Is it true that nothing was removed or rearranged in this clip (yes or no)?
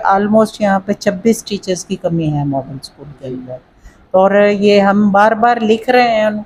yes